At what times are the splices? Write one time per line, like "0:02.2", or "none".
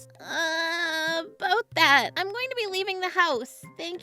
none

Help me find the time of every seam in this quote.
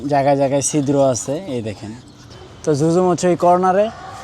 0:02.2

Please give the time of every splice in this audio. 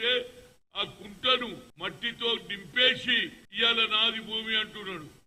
0:01.7
0:03.4

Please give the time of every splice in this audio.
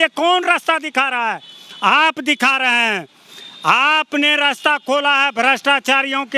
none

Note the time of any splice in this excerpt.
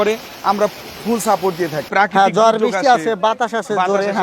0:01.9

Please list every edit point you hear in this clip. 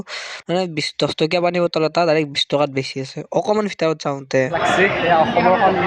0:04.6

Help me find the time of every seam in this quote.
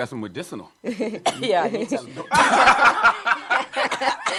none

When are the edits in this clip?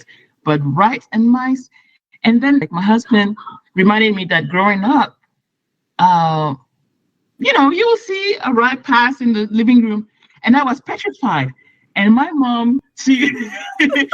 0:02.7

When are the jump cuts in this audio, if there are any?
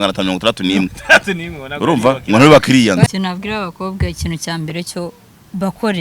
0:03.1

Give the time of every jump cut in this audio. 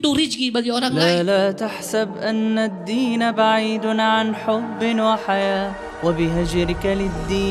0:01.0

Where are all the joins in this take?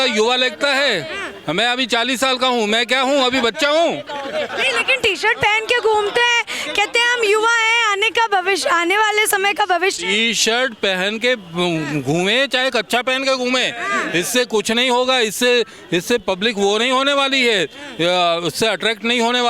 none

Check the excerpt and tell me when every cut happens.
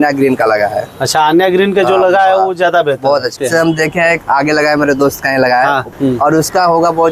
0:03.3
0:05.9

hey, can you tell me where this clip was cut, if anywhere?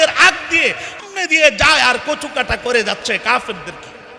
0:01.0

